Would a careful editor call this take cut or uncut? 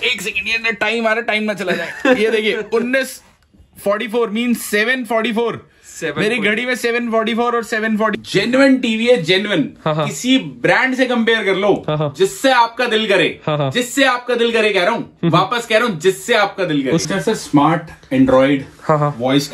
cut